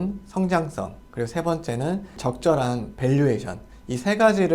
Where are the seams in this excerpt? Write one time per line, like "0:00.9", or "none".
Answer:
none